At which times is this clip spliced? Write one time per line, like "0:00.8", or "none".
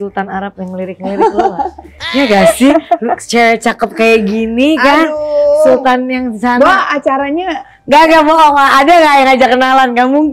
none

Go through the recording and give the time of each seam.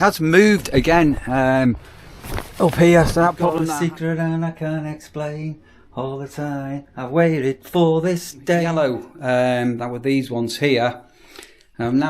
0:03.5
0:08.7

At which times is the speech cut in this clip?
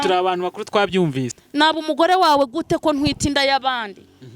0:01.3

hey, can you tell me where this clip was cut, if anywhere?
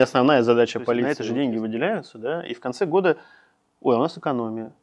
0:01.1

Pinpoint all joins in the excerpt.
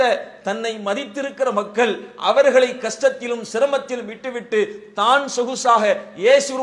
none

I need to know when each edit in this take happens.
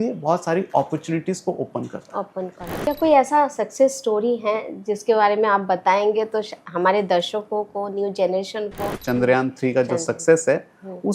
0:02.8
0:08.9

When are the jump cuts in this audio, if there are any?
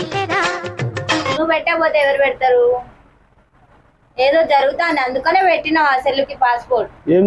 0:01.3

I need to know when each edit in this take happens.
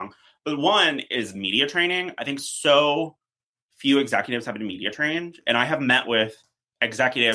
none

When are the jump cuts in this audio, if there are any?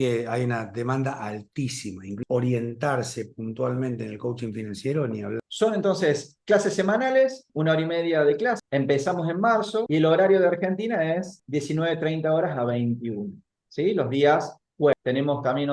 0:02.2
0:05.5
0:08.6
0:09.9
0:14.9

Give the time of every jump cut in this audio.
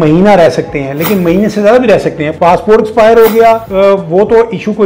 0:02.3
0:03.7

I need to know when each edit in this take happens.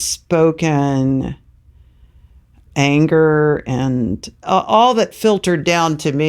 0:02.7
0:04.4

